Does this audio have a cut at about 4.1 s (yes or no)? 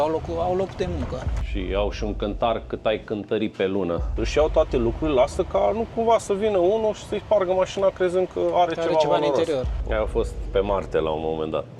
yes